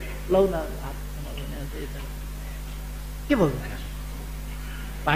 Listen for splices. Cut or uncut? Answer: uncut